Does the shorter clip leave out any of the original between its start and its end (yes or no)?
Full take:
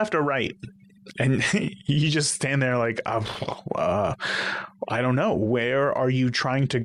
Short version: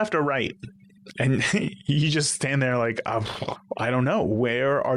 yes